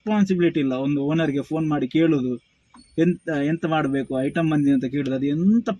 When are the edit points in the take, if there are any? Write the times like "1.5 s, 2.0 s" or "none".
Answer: none